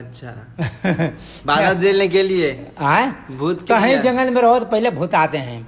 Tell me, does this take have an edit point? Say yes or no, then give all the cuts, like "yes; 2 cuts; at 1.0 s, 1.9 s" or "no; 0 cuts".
no; 0 cuts